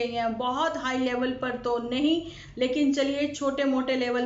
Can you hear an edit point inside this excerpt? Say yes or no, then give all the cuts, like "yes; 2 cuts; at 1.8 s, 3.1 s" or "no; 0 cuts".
no; 0 cuts